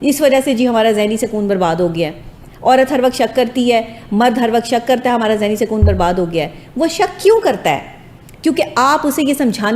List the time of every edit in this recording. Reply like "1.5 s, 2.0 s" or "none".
none